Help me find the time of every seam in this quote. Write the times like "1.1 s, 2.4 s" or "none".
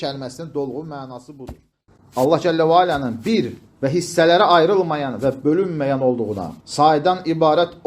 1.9 s